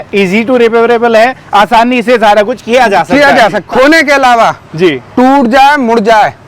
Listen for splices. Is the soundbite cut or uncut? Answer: cut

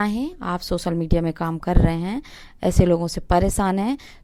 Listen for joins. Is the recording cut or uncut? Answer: uncut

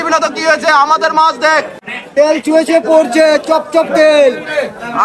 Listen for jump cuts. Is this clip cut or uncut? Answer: cut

